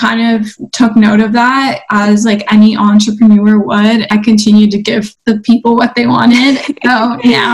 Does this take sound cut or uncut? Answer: cut